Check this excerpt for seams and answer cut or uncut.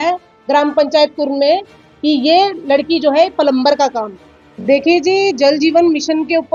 uncut